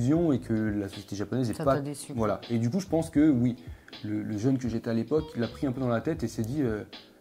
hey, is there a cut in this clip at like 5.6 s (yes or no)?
no